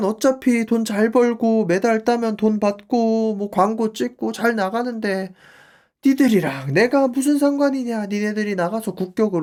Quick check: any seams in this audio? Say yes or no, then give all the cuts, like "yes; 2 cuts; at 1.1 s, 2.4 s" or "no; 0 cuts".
no; 0 cuts